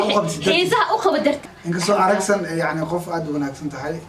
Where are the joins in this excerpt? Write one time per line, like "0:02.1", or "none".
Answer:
0:01.4